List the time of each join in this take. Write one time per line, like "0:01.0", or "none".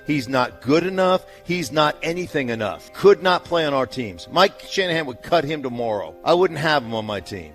none